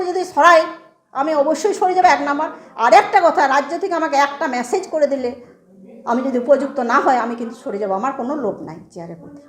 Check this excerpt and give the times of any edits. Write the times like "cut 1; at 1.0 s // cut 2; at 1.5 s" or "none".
none

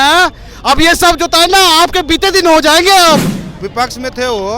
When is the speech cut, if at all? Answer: cut 1; at 3.4 s

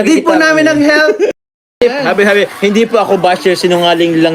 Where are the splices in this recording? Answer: cut 1; at 1.5 s

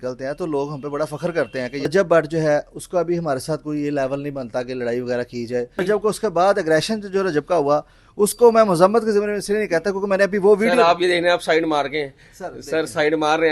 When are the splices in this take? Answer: cut 1; at 1.9 s // cut 2; at 5.8 s

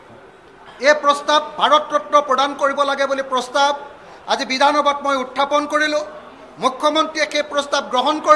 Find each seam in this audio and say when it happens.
none

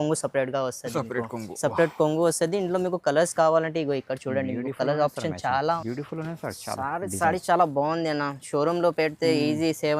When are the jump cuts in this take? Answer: cut 1; at 5.8 s

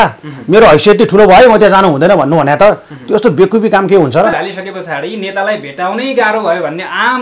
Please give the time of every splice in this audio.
cut 1; at 4.3 s

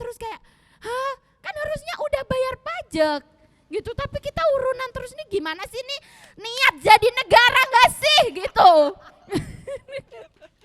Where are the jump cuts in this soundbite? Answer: none

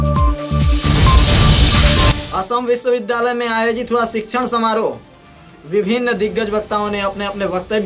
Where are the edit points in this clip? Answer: none

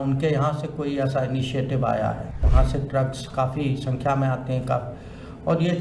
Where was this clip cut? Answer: cut 1; at 2.4 s

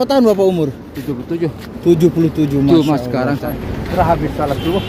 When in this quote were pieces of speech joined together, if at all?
cut 1; at 3.5 s

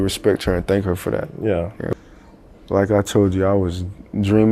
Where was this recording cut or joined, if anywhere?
cut 1; at 1.9 s

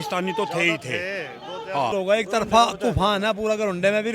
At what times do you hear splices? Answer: cut 1; at 1.9 s

